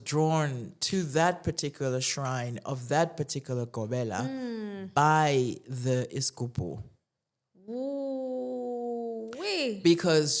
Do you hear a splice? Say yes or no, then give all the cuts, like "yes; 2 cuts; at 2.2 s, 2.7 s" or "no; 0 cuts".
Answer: no; 0 cuts